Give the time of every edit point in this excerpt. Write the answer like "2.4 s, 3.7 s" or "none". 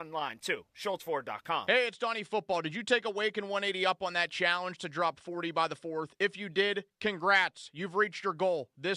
1.6 s